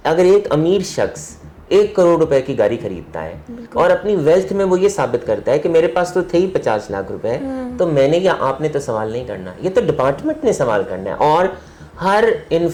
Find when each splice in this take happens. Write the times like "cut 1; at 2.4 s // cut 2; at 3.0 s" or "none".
none